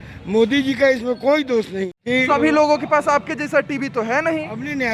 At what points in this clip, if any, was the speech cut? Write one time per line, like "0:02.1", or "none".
0:01.9